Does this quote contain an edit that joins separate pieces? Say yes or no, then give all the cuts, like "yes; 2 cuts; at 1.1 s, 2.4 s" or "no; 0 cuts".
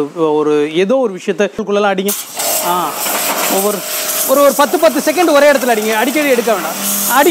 yes; 1 cut; at 1.6 s